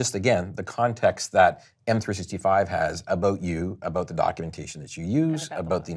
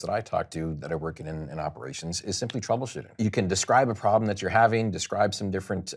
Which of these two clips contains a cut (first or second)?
second